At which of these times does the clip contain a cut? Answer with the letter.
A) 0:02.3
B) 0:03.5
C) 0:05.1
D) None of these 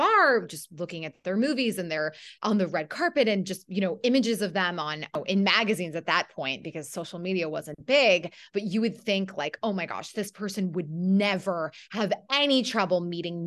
C